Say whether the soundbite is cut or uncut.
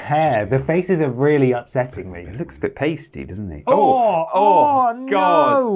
uncut